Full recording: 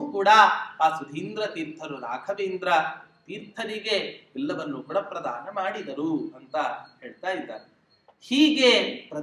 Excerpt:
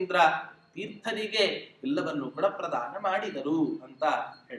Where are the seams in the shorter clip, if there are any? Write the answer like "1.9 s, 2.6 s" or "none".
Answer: none

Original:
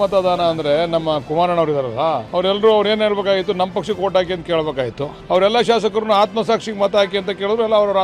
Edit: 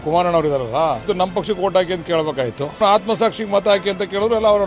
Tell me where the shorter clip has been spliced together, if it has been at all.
1.0 s, 2.8 s

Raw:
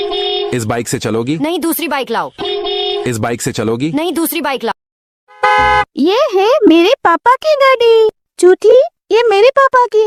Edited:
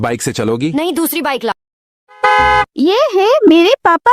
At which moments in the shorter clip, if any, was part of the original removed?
1.5 s

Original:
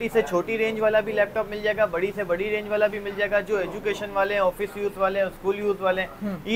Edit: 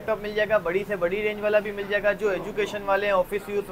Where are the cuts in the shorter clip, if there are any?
none

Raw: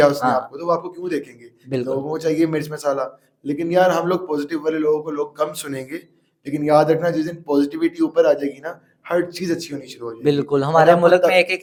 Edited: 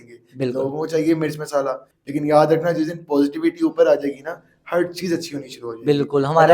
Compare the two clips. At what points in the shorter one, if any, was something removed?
1.9 s

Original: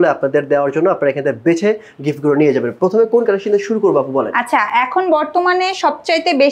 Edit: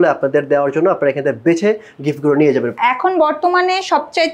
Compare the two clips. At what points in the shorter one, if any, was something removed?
2.7 s

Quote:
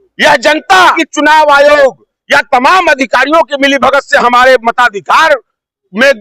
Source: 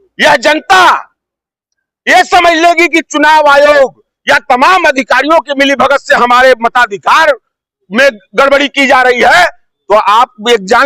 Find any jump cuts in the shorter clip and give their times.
1.0 s

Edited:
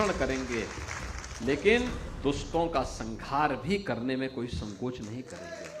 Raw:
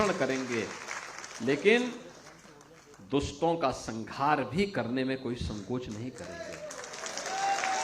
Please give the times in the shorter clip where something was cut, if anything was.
2.0 s

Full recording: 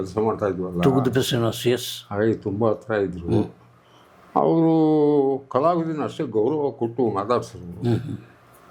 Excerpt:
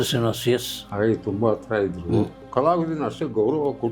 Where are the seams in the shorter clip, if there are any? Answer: 2.5 s

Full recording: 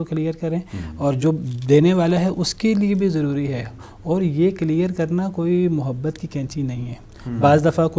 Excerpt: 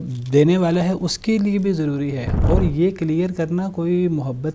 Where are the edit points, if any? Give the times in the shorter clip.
2.3 s

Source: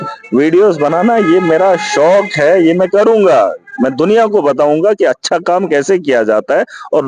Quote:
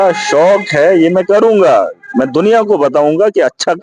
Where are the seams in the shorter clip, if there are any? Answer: none

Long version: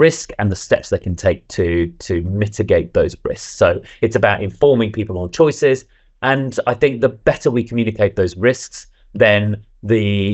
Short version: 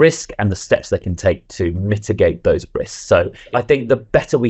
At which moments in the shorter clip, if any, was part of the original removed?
1.5 s, 3.4 s

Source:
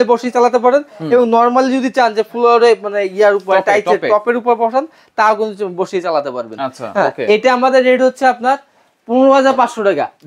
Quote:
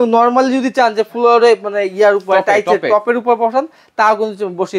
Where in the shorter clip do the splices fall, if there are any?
none

